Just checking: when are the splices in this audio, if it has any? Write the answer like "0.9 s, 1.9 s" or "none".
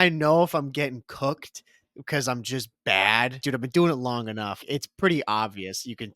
3.4 s, 4.6 s